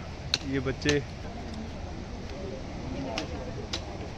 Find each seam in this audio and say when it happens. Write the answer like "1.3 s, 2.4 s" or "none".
none